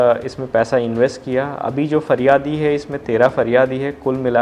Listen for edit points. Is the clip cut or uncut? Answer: uncut